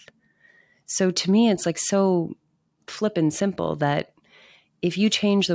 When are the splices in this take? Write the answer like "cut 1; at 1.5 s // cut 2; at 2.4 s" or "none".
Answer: none